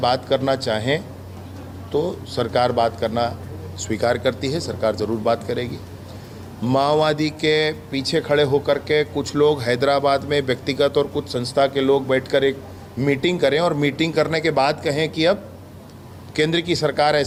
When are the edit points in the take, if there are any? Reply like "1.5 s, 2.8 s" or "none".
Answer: none